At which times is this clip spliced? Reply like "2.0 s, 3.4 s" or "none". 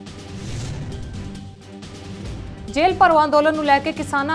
1.2 s